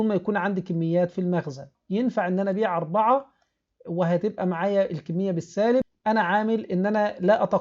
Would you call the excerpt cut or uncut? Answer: cut